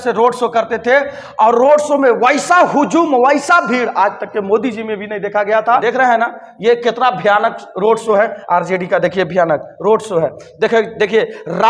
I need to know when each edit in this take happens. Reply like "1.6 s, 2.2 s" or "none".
5.8 s